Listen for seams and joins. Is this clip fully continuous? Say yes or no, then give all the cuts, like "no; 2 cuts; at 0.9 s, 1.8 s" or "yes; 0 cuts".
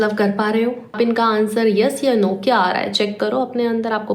no; 1 cut; at 0.9 s